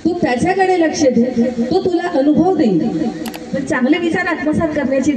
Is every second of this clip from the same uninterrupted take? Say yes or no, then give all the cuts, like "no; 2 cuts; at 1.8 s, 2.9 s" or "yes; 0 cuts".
no; 1 cut; at 3.5 s